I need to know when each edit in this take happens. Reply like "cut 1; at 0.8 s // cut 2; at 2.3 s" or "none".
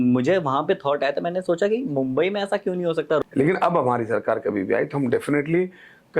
cut 1; at 3.2 s